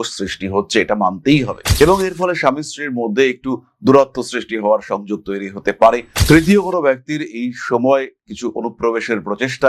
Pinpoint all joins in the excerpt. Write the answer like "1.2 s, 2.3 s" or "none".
none